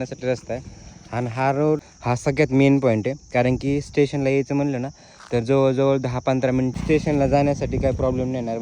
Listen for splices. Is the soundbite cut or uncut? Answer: cut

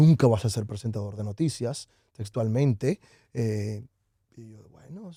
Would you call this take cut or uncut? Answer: uncut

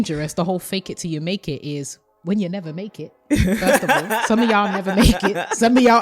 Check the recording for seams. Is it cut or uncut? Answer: uncut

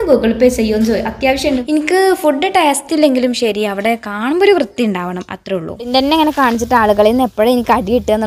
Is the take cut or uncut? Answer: cut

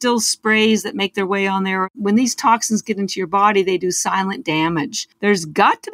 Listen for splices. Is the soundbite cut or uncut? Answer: cut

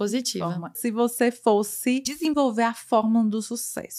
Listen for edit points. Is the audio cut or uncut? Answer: cut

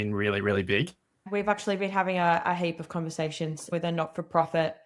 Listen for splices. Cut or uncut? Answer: cut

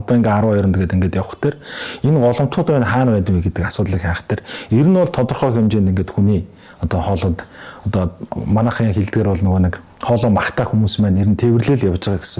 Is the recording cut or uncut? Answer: uncut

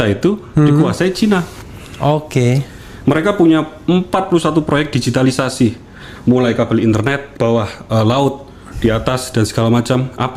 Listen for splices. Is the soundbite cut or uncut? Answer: uncut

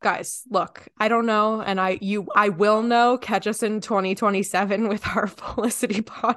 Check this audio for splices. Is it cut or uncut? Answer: uncut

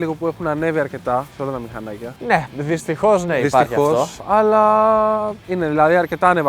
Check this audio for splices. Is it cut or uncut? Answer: uncut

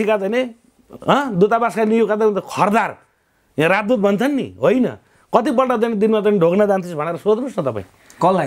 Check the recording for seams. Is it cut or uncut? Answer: uncut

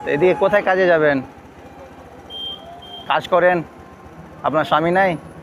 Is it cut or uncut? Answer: uncut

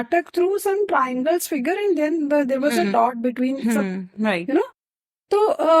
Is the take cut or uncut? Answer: uncut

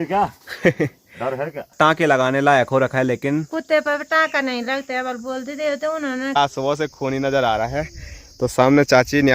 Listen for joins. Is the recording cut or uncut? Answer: cut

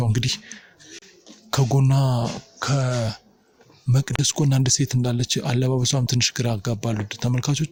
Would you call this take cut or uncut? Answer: uncut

